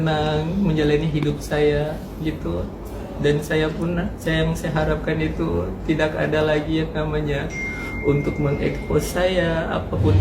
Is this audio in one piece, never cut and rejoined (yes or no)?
yes